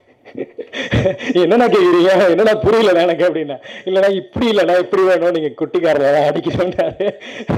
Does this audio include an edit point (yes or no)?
no